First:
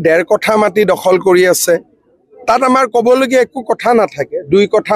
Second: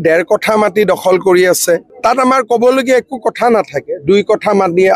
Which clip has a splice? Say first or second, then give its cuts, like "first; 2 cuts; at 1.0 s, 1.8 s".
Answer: second; 1 cut; at 1.9 s